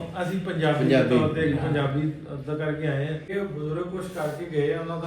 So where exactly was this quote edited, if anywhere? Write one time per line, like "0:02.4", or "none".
0:03.3